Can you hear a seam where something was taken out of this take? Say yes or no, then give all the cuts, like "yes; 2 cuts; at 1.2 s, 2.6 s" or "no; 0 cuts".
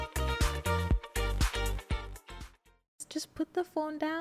yes; 1 cut; at 3.0 s